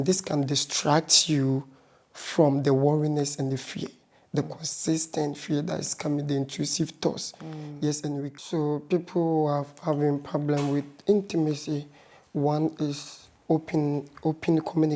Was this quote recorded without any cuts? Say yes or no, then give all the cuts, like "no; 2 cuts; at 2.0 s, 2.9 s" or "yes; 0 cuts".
no; 1 cut; at 8.3 s